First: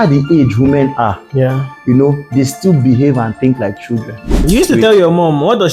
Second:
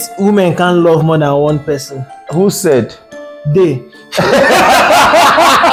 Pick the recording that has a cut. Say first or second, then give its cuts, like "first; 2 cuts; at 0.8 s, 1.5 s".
first; 1 cut; at 4.4 s